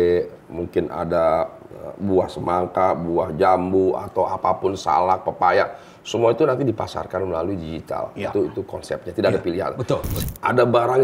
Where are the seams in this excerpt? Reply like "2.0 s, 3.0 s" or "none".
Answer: 10.1 s